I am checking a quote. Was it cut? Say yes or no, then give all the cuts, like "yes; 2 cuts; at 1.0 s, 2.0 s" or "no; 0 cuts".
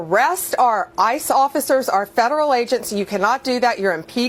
no; 0 cuts